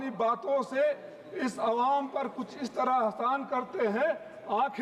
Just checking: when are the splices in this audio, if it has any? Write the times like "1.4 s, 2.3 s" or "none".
none